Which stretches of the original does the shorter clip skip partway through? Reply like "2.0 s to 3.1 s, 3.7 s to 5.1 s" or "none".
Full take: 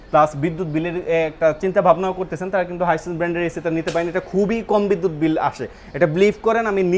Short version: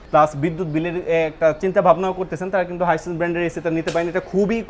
none